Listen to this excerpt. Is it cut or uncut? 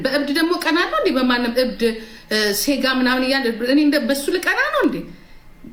uncut